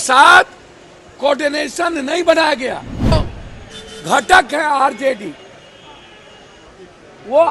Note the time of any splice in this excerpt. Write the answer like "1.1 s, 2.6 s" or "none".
3.1 s

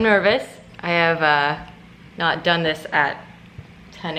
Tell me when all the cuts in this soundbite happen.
none

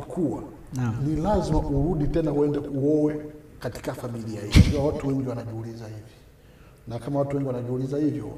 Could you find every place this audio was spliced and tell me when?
4.7 s

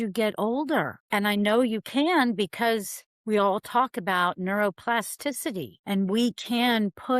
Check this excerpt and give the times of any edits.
5.7 s

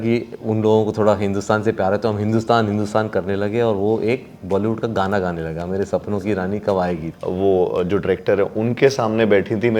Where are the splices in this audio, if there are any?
7.1 s

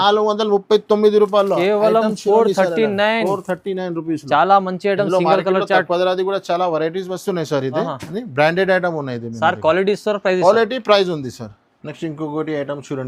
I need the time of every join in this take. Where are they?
none

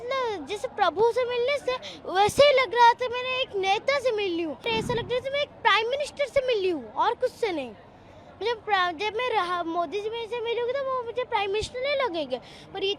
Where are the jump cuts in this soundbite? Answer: 4.6 s

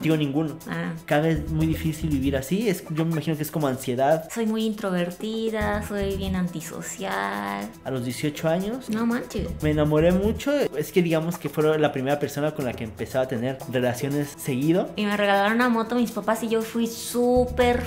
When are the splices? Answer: 1.0 s, 4.3 s, 7.7 s, 14.9 s

